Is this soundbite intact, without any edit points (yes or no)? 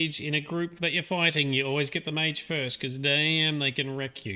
yes